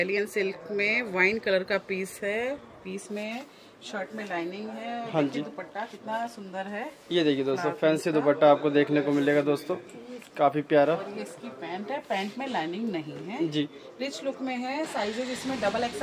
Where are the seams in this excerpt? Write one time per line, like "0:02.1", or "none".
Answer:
none